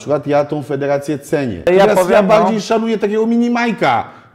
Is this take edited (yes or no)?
yes